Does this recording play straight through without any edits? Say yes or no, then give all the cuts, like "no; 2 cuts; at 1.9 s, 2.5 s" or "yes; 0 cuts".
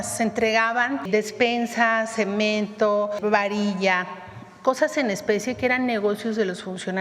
no; 2 cuts; at 1.0 s, 3.2 s